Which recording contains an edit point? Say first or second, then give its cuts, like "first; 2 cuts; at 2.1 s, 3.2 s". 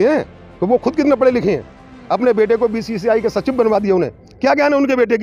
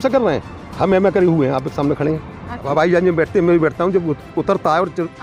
second; 1 cut; at 2.6 s